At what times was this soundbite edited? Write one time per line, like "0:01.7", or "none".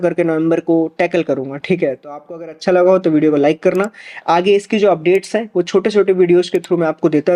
none